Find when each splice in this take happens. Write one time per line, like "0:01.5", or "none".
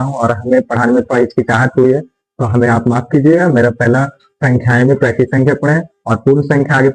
none